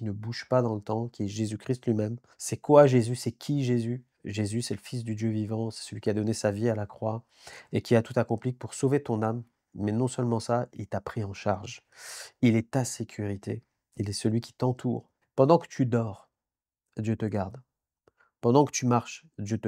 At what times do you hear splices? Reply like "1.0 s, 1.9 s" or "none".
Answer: 15.2 s